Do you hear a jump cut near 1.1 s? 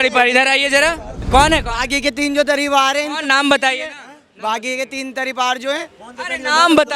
yes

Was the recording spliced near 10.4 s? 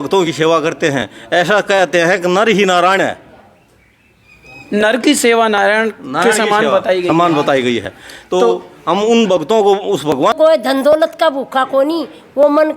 yes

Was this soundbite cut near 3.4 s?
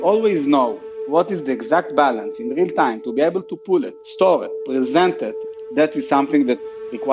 no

